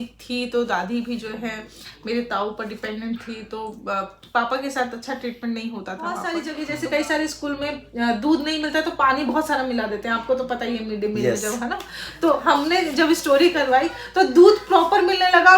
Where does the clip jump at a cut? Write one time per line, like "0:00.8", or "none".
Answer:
0:06.3